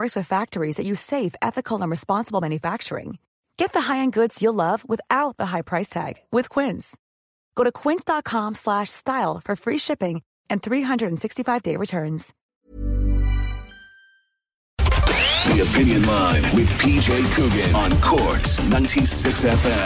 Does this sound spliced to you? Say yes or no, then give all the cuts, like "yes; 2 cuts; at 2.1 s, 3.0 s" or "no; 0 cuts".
yes; 1 cut; at 14.8 s